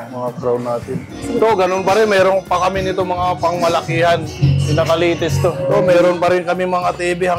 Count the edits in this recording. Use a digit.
3